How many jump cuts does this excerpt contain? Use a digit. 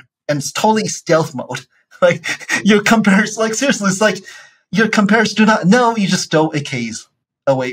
0